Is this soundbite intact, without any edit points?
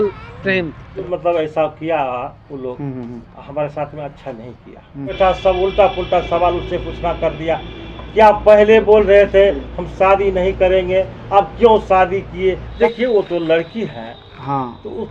no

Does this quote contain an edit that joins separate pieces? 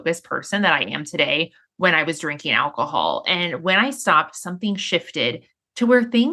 no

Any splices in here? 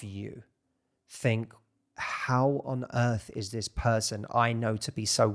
no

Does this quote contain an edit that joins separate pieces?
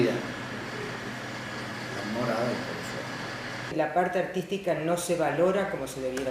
yes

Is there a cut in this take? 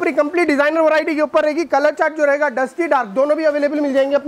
no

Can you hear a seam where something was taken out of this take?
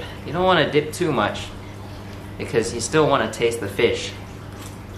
no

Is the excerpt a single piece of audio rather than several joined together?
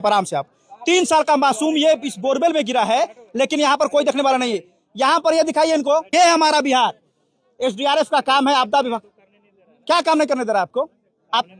no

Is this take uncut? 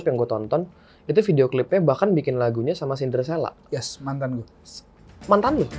yes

